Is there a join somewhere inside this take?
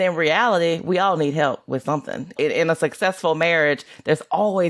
yes; 1 cut; at 2.3 s

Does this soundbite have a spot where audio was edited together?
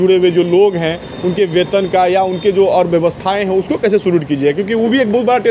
no; 0 cuts

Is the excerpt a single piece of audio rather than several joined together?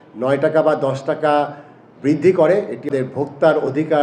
no; 1 cut; at 2.9 s

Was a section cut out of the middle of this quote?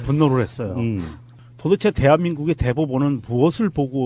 no; 0 cuts

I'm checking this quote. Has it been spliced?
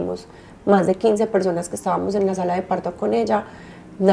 no; 0 cuts

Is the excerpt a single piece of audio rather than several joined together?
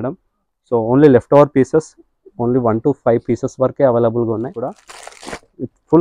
no; 1 cut; at 4.8 s

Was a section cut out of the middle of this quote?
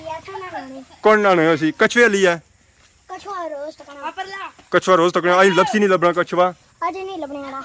no; 0 cuts

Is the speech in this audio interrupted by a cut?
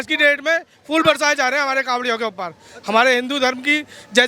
no; 0 cuts

